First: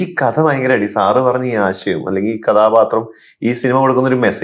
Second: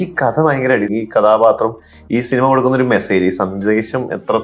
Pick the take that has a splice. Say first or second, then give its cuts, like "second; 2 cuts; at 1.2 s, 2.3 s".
second; 1 cut; at 0.9 s